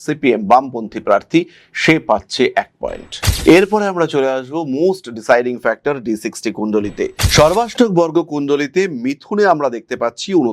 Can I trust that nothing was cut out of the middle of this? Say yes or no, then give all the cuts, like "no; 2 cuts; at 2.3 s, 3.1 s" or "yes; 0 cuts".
no; 1 cut; at 7.2 s